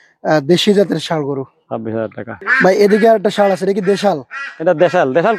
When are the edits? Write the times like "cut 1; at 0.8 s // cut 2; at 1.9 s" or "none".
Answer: none